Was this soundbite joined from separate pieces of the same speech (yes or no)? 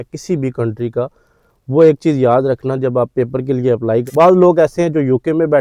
yes